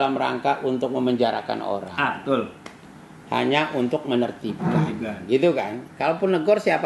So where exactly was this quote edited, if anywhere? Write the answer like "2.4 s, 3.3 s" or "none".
none